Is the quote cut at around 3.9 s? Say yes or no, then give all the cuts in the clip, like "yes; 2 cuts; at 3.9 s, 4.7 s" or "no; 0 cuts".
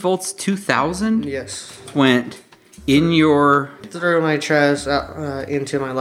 yes; 2 cuts; at 1.9 s, 3.9 s